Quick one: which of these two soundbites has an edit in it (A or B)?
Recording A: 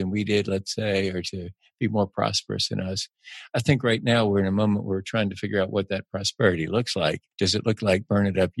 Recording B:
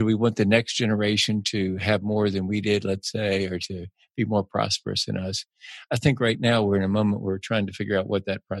A